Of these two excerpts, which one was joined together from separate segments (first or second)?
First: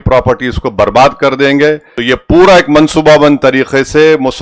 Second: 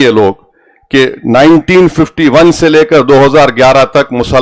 first